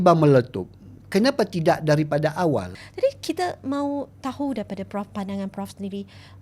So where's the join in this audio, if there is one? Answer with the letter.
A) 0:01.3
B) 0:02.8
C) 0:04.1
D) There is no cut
B